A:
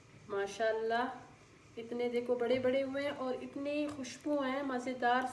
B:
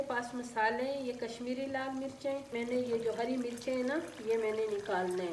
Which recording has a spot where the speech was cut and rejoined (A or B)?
B